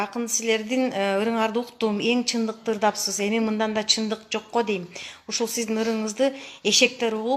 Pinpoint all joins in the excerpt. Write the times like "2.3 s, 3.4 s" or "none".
none